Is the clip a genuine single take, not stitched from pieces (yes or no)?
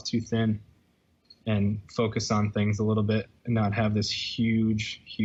yes